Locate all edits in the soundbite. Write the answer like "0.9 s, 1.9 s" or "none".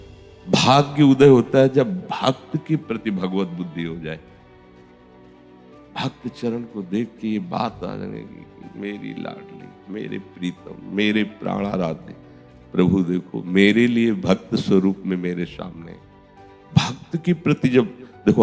4.2 s, 5.9 s